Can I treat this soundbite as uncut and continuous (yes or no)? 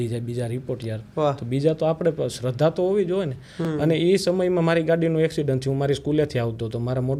yes